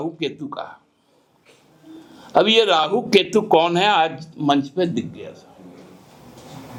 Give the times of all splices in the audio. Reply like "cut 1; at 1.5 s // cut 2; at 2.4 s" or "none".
none

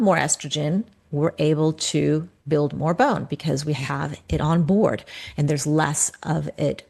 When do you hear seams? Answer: none

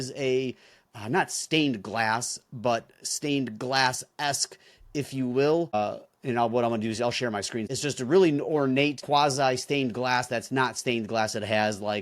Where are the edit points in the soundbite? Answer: cut 1; at 5.7 s // cut 2; at 7.7 s // cut 3; at 9.0 s

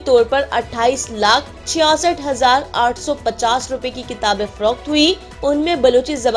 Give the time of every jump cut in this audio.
cut 1; at 1.6 s // cut 2; at 5.3 s

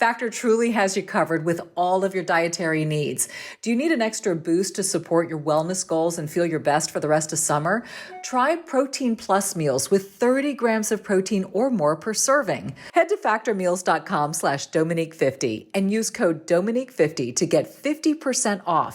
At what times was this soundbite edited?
cut 1; at 12.7 s

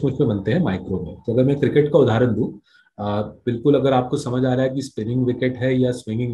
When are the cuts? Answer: none

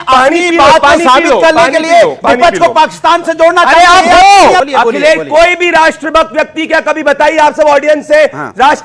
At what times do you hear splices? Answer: cut 1; at 4.6 s

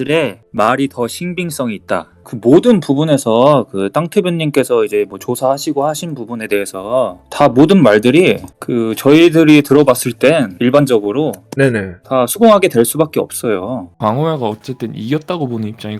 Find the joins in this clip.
cut 1; at 10.5 s // cut 2; at 13.9 s

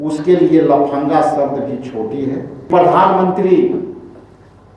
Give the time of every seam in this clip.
cut 1; at 2.7 s

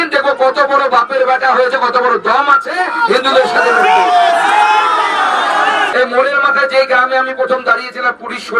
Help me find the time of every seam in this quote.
cut 1; at 5.9 s

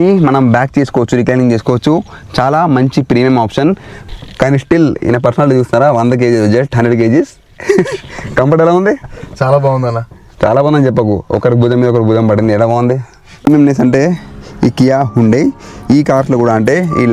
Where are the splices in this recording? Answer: cut 1; at 3.9 s // cut 2; at 13.5 s

